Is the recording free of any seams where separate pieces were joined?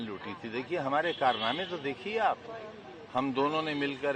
yes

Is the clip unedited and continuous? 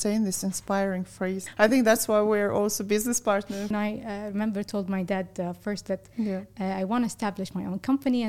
no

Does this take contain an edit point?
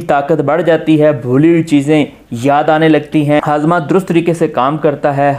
yes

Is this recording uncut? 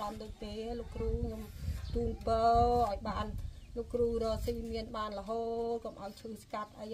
yes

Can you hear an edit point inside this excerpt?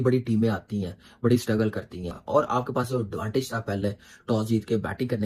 no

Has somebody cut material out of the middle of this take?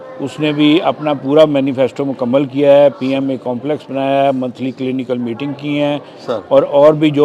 no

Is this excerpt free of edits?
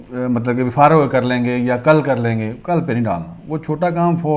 yes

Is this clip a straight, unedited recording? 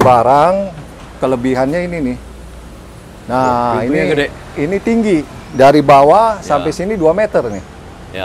yes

